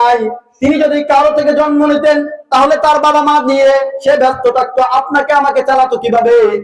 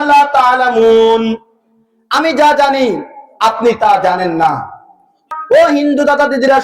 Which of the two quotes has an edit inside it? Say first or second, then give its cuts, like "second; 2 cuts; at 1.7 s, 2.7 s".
second; 1 cut; at 5.3 s